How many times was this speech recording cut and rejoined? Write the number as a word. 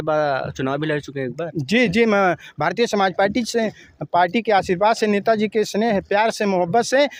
zero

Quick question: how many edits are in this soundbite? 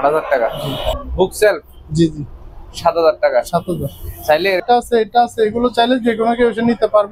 two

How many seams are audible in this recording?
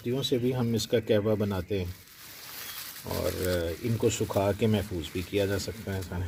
zero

